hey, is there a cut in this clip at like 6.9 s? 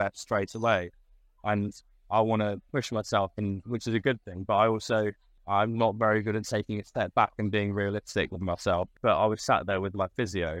no; 2 cuts; at 5.3 s, 8.9 s

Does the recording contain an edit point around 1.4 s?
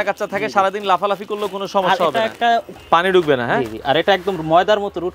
no; 1 cut; at 2.7 s

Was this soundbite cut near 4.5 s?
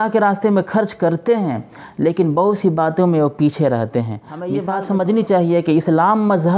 yes; 1 cut; at 4.5 s

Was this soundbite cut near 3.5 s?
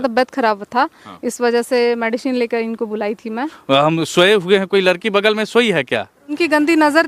yes; 2 cuts; at 3.5 s, 6.4 s

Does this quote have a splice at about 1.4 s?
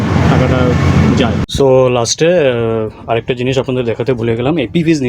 yes; 1 cut; at 1.4 s

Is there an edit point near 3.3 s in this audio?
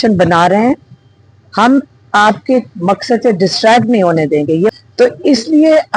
no; 1 cut; at 4.7 s

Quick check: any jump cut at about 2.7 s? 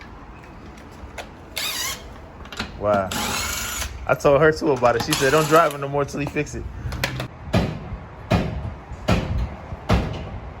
no; 1 cut; at 7.3 s

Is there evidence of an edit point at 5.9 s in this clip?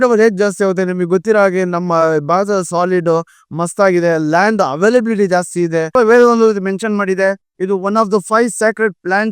yes; 1 cut; at 5.9 s

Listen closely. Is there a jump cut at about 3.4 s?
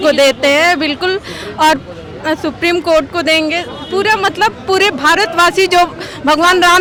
no; 0 cuts

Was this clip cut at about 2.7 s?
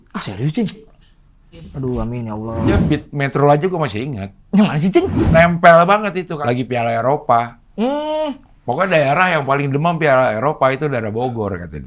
yes; 3 cuts; at 2.7 s, 5.2 s, 6.3 s

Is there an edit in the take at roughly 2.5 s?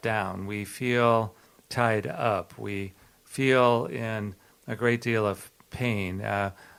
no; 0 cuts

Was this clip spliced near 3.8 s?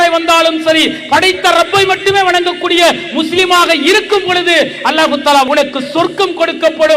no; 1 cut; at 5.5 s

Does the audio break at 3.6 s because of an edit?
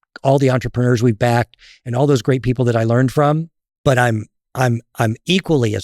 yes; 1 cut; at 3.6 s

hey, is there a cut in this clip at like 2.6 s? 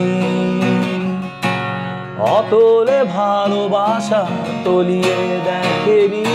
no; 0 cuts

